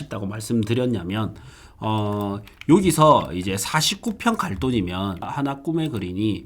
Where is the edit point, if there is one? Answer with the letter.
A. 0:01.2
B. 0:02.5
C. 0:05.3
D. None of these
C